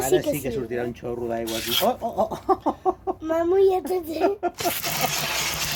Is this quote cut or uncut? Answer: uncut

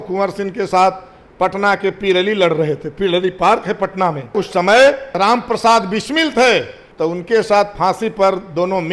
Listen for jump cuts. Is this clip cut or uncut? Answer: cut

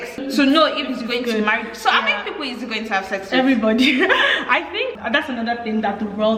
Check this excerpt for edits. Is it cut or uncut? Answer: uncut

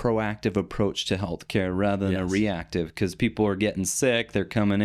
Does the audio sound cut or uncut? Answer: uncut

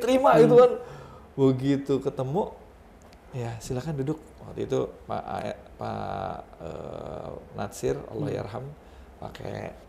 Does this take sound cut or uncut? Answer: uncut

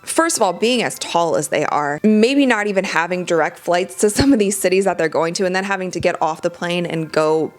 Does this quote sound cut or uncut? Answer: uncut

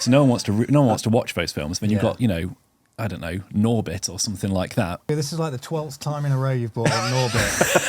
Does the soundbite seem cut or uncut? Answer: cut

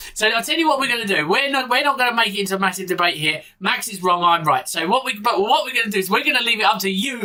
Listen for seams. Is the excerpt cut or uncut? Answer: uncut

